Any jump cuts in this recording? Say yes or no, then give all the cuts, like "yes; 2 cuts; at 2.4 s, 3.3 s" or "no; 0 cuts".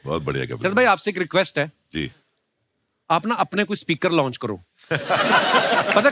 no; 0 cuts